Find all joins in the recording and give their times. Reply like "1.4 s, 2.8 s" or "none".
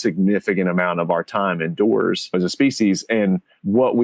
2.3 s